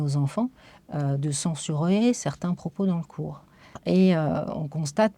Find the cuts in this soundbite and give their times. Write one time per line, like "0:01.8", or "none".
0:03.8